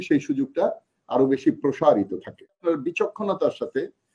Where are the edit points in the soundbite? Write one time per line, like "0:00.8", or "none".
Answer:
0:02.6